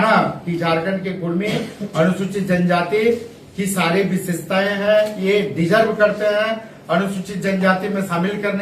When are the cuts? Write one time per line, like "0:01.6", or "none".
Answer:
none